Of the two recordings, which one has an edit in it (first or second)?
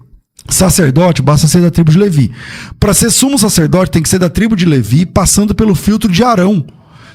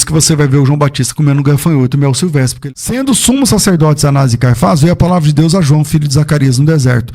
second